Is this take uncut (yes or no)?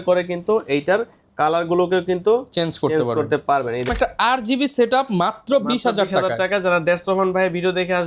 no